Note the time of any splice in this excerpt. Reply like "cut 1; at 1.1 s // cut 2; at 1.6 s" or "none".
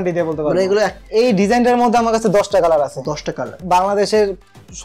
cut 1; at 1.0 s // cut 2; at 3.6 s